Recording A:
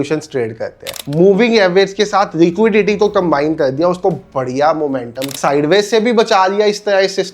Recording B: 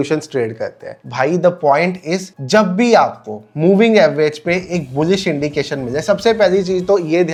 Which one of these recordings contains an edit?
A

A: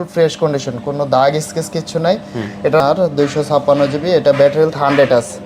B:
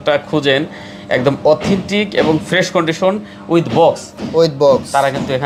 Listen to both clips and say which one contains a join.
A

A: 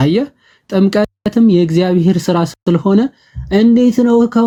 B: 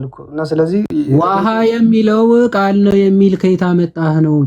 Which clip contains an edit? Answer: B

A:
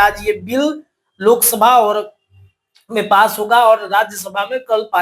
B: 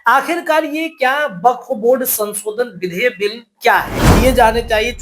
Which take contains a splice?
B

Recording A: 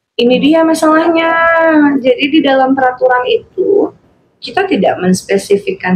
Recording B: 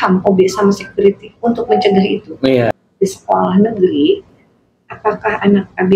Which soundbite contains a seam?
B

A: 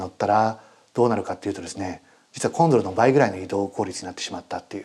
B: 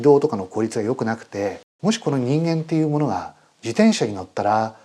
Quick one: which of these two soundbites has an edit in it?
B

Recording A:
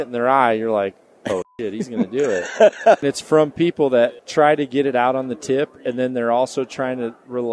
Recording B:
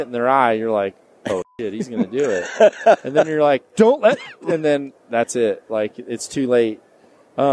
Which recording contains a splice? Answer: A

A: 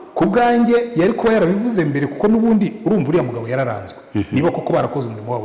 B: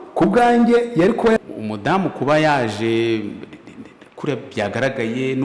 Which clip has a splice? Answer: B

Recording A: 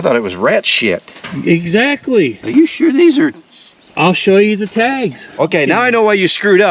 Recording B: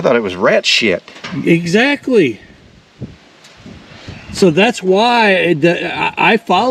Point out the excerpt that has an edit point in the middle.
A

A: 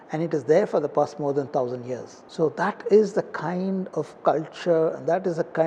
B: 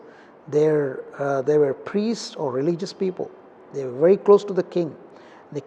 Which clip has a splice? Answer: A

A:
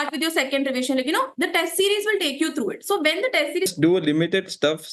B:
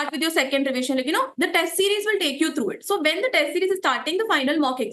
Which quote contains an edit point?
A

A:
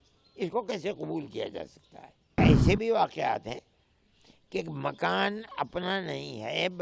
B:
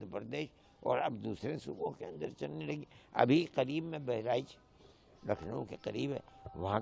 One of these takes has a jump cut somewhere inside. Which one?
A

